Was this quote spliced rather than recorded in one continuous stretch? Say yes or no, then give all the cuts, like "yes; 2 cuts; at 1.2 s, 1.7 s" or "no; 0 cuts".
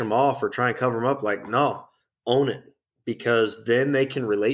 no; 0 cuts